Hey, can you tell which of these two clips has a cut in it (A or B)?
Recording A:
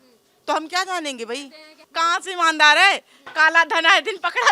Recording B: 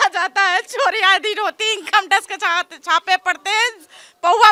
A